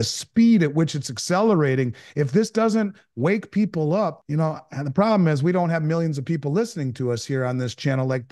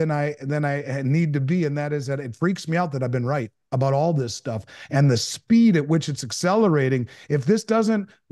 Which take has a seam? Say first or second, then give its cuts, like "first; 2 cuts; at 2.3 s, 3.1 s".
first; 1 cut; at 4.2 s